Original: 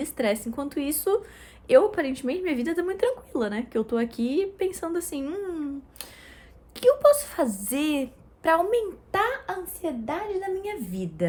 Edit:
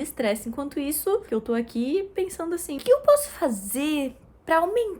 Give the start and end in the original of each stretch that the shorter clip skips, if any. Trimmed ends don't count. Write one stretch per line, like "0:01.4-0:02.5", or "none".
0:01.3-0:03.7
0:05.2-0:06.7